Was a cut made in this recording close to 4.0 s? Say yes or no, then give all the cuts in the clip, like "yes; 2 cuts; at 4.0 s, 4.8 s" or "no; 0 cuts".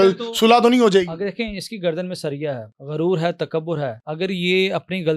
yes; 2 cuts; at 2.7 s, 4.0 s